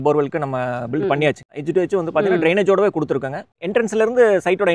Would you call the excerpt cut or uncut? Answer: cut